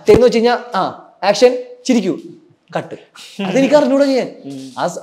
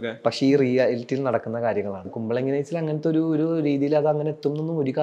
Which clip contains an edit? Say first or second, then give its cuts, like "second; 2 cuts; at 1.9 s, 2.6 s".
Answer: second; 1 cut; at 2.1 s